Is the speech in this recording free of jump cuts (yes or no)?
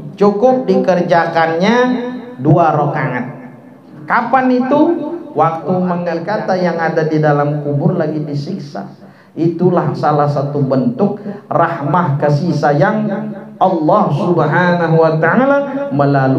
no